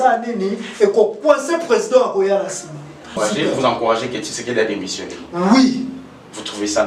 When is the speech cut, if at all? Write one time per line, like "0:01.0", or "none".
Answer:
0:03.1